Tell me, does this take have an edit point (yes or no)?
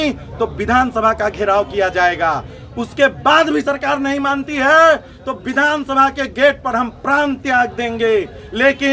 no